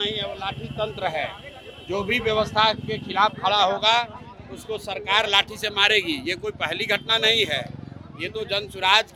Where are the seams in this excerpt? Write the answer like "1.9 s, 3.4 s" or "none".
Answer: none